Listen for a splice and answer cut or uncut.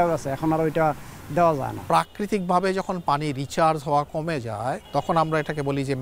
cut